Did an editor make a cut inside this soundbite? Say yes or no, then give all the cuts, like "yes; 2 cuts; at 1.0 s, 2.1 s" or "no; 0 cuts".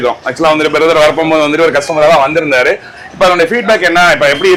no; 0 cuts